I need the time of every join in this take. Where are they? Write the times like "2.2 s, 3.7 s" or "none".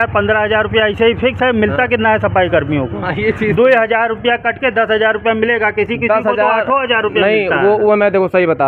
none